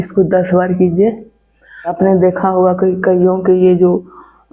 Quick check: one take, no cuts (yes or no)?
no